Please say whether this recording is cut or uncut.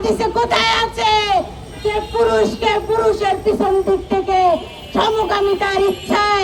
uncut